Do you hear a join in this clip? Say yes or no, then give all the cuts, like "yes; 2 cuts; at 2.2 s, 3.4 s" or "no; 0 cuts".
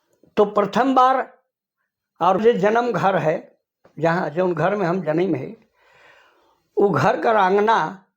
yes; 1 cut; at 2.4 s